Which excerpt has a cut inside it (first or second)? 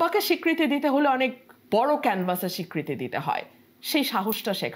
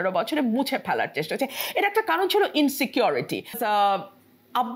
second